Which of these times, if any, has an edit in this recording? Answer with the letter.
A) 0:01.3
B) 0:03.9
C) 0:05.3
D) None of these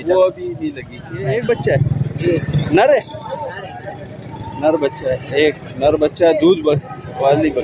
A